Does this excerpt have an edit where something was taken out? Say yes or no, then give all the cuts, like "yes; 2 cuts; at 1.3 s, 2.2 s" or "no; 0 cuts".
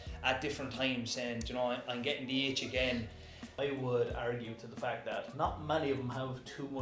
yes; 1 cut; at 3.5 s